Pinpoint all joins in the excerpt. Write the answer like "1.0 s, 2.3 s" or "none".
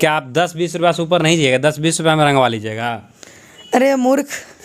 none